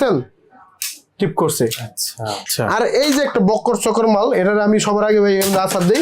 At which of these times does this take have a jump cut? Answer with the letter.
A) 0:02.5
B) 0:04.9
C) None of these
A